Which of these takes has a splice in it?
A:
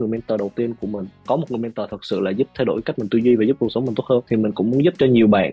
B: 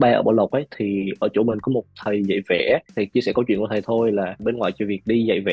A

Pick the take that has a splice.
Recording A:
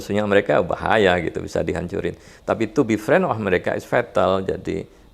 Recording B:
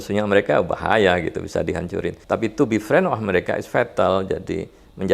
B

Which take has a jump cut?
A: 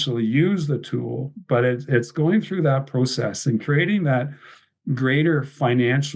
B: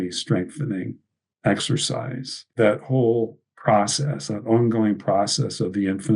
B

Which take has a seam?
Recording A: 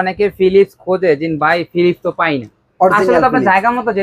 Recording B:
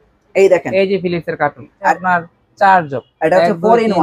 B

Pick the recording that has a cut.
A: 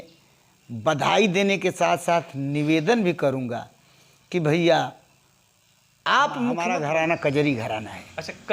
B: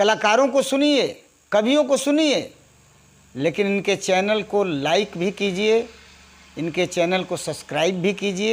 A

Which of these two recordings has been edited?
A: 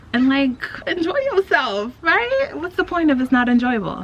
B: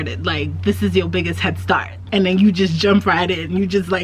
B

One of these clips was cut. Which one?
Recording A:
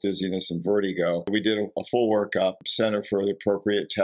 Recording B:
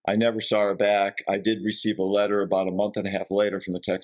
A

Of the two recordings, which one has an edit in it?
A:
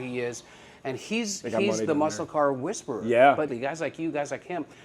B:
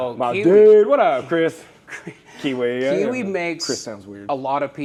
A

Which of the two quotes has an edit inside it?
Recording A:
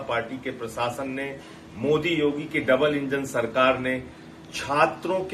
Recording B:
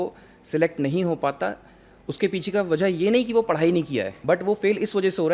B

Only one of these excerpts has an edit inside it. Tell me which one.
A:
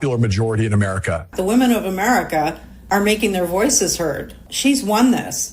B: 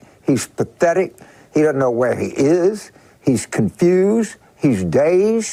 A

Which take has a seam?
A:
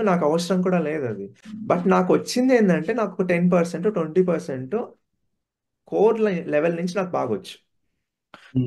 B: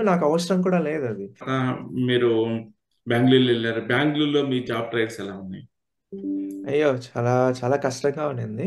B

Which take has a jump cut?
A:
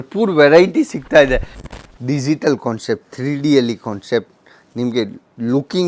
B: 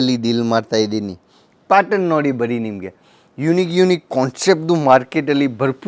A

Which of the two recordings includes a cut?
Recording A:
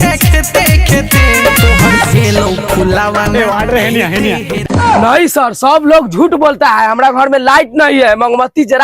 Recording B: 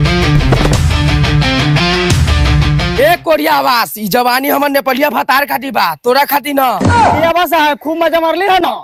A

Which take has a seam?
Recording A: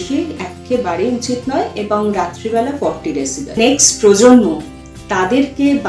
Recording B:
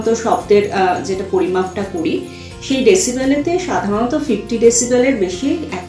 A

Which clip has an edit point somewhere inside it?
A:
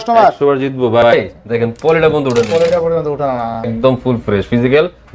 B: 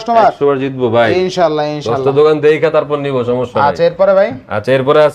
A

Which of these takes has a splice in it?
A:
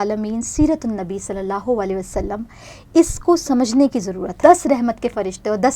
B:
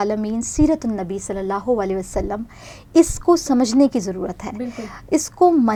A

